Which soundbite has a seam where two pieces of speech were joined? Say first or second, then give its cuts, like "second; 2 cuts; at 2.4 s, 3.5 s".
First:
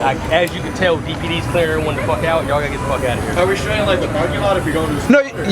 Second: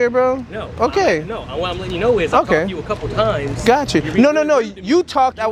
first; 1 cut; at 3.4 s